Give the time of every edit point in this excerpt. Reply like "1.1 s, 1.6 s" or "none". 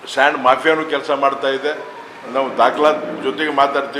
2.3 s